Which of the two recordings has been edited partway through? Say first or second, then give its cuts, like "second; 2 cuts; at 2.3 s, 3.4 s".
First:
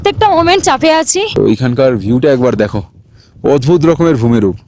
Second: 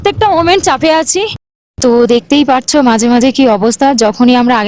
first; 1 cut; at 1.2 s